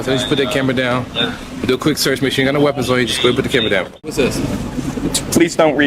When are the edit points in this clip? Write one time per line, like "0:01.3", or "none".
0:04.1